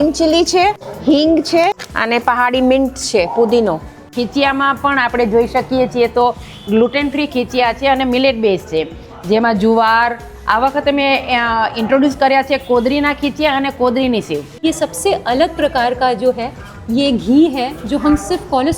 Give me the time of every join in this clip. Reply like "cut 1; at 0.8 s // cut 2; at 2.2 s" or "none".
cut 1; at 0.9 s // cut 2; at 1.9 s // cut 3; at 4.1 s // cut 4; at 14.6 s